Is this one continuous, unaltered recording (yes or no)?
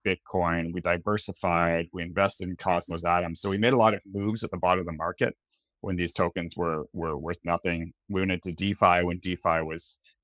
yes